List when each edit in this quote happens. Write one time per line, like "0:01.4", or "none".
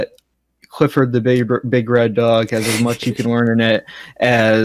none